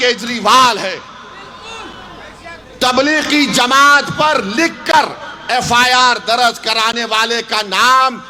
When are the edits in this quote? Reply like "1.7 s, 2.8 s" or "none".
none